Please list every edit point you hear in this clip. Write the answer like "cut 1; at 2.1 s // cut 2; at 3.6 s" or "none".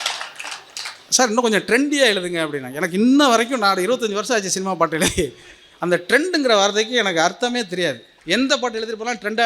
cut 1; at 8.1 s